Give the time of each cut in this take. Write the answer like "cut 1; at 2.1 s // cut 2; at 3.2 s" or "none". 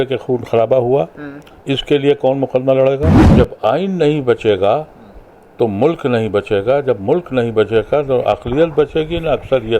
cut 1; at 3.2 s